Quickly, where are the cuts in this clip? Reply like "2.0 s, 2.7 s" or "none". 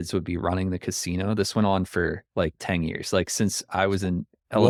none